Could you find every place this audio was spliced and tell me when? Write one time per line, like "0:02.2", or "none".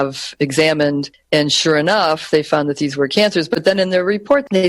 0:01.1